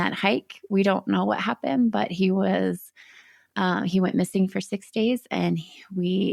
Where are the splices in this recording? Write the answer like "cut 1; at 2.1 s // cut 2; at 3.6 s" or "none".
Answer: none

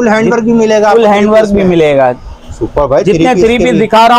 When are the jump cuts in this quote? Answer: none

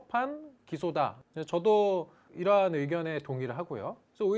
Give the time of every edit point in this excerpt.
cut 1; at 1.2 s

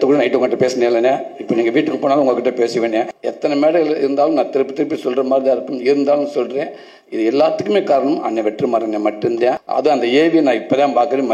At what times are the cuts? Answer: cut 1; at 3.2 s // cut 2; at 9.6 s

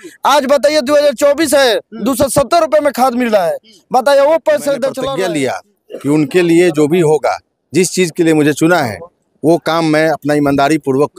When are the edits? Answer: cut 1; at 5.0 s

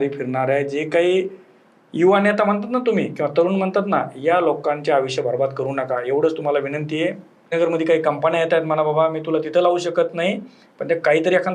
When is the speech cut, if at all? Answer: cut 1; at 7.5 s

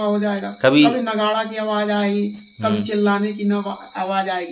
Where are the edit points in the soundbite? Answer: none

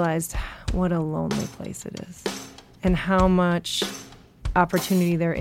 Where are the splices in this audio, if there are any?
cut 1; at 2.5 s

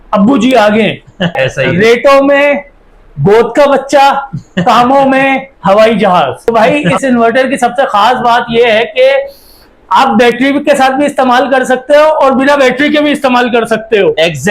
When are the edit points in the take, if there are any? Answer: cut 1; at 1.4 s // cut 2; at 6.5 s

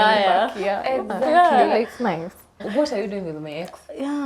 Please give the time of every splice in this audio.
cut 1; at 2.6 s

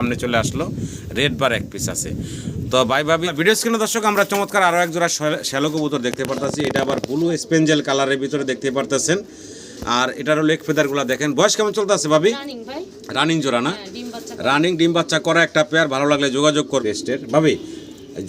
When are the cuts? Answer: cut 1; at 3.3 s // cut 2; at 16.8 s

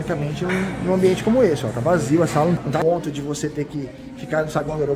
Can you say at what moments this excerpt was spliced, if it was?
cut 1; at 2.6 s

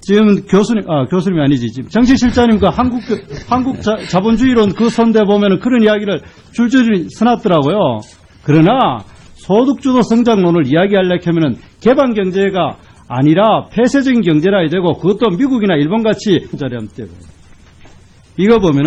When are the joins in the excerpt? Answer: none

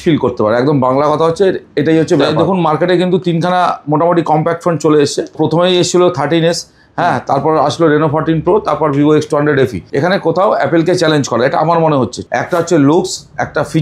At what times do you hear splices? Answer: cut 1; at 2.3 s // cut 2; at 5.3 s // cut 3; at 9.8 s // cut 4; at 12.2 s

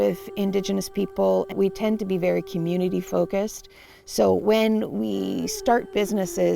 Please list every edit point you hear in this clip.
cut 1; at 1.5 s

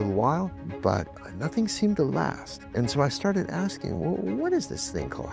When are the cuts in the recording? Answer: none

